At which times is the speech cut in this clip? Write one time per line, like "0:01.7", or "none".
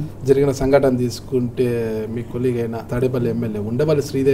0:02.9